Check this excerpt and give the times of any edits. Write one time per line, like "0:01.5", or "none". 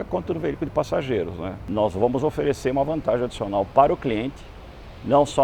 0:01.6

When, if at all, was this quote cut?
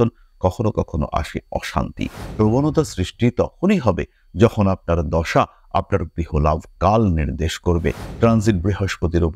0:02.2
0:08.0

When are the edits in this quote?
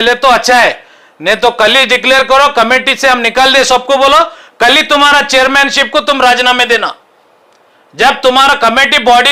none

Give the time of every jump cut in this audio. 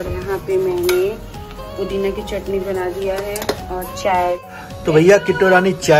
0:04.5

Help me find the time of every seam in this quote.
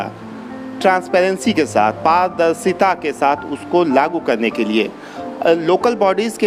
none

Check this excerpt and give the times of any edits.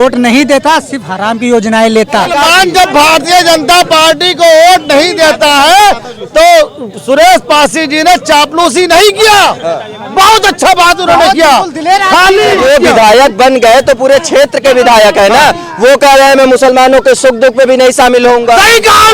0:02.3
0:12.6

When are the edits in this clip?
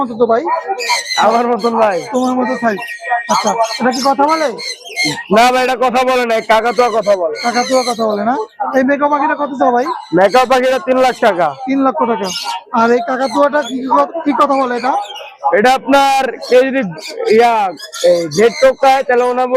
none

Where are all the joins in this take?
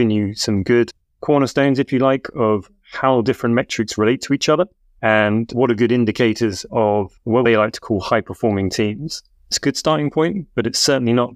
0:01.1
0:04.8
0:06.7
0:09.5

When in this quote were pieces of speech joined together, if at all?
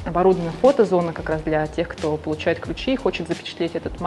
none

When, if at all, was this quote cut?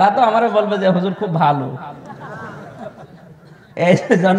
none

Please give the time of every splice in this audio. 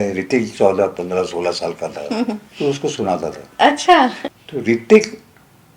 0:04.3

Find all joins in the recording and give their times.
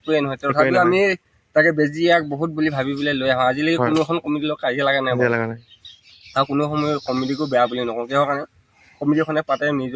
none

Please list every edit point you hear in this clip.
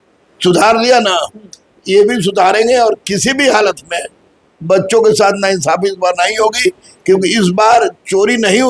none

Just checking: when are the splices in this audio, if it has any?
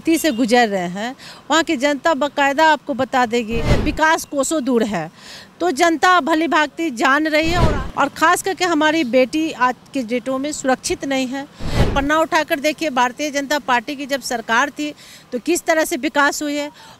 0:03.8
0:07.7
0:11.9

